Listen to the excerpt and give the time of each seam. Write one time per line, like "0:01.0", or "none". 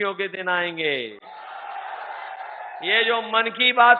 none